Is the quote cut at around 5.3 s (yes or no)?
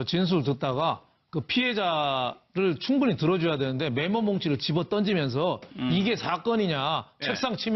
no